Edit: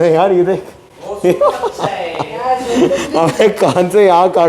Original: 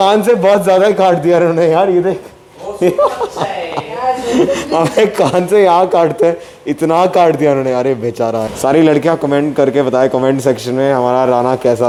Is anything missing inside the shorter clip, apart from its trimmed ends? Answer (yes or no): no